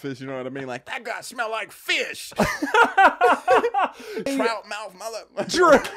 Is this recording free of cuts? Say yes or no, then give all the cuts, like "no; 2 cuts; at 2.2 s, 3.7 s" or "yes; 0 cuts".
no; 2 cuts; at 2.3 s, 4.3 s